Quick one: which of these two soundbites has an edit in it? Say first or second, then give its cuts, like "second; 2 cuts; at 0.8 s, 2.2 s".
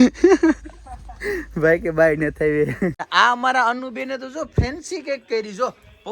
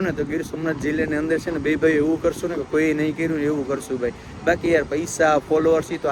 first; 1 cut; at 3.0 s